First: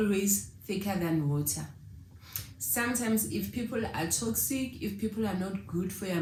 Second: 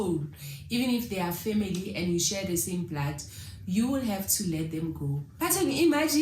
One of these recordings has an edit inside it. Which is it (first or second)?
second